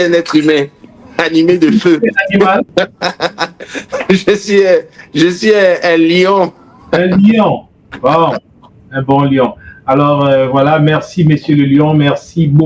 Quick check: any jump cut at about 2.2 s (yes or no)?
no